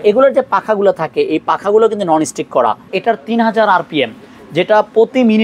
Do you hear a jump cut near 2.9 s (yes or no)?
yes